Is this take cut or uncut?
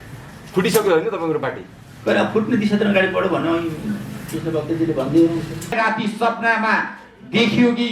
cut